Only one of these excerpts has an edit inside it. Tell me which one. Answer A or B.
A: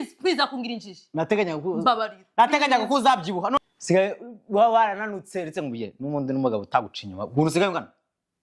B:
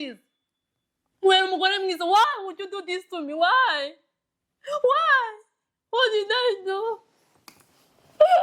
A